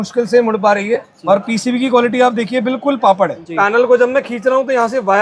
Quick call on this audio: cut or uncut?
cut